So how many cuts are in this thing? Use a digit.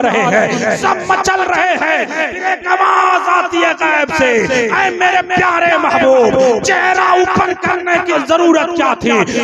1